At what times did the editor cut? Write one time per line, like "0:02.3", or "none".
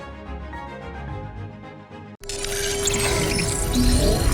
0:02.2